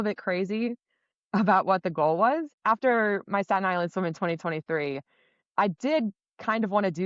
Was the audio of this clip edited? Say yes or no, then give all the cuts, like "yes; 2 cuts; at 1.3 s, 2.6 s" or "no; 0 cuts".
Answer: yes; 1 cut; at 2.5 s